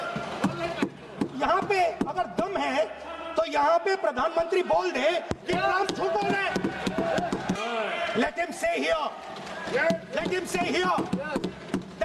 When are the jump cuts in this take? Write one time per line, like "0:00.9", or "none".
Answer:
0:07.6